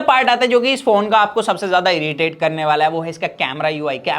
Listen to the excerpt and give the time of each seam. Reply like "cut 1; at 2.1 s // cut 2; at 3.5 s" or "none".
none